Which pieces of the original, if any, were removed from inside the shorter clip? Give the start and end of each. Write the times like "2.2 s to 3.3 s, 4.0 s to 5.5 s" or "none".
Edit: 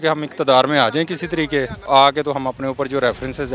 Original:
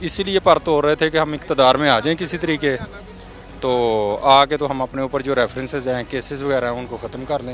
2.9 s to 4.2 s

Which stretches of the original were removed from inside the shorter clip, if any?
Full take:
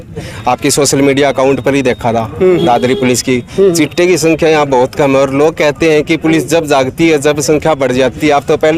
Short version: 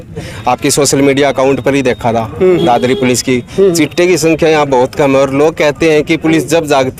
none

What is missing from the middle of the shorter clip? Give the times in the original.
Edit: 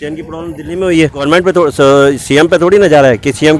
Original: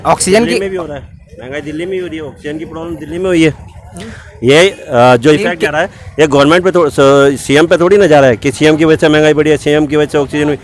3.7 s to 6.4 s

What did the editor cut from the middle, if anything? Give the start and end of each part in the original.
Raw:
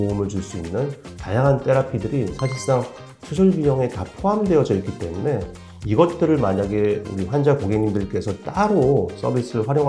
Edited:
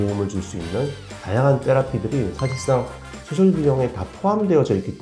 none

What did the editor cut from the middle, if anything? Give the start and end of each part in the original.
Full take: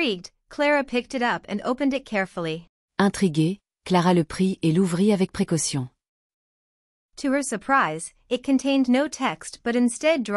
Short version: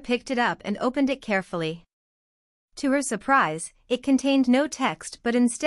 2.8 s to 6.3 s

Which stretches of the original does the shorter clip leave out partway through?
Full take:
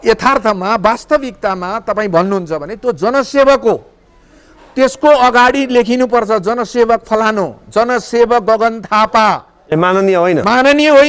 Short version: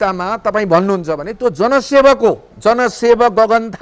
3.9 s to 7.6 s

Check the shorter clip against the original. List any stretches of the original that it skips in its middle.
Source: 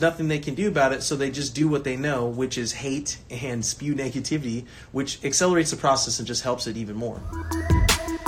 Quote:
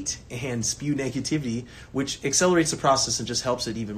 none

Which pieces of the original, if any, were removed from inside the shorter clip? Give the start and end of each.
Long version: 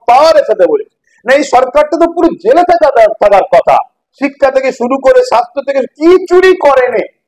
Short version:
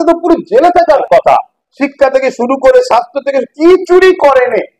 2.9 s to 3.4 s

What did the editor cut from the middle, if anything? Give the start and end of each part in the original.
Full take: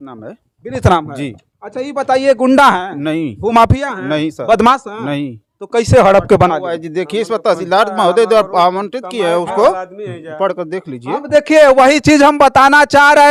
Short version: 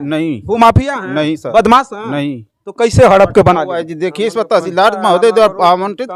none

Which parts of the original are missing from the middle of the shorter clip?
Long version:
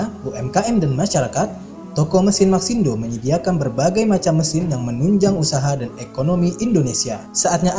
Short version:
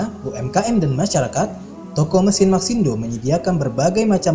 none

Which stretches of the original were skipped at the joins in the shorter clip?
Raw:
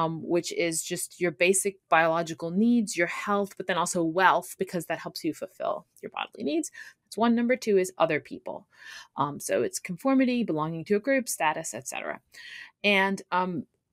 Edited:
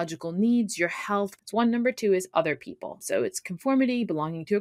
3.6 s to 7.0 s, 8.6 s to 9.4 s

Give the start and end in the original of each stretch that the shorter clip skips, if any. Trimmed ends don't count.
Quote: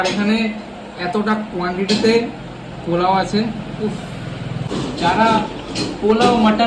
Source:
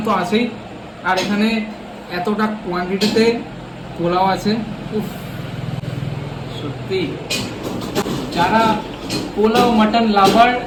5.8 s to 8.0 s

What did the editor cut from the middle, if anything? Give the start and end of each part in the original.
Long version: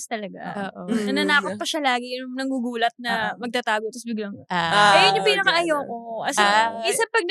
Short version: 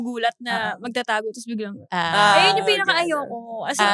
none

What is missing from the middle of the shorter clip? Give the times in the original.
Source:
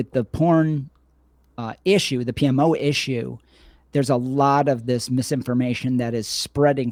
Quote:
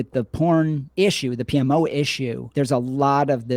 0.9 s to 1.7 s, 3.3 s to 3.8 s

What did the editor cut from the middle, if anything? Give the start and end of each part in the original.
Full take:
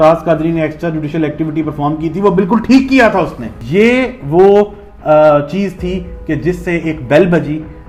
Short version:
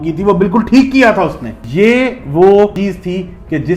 4.7 s to 5.5 s

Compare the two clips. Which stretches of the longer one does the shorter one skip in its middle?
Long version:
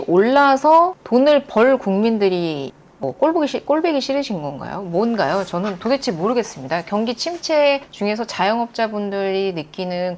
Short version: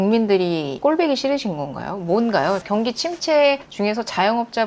2.7 s to 3.6 s, 5.5 s to 6.9 s

